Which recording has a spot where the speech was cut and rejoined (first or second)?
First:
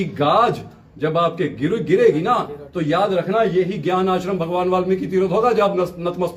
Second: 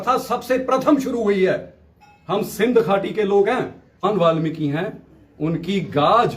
second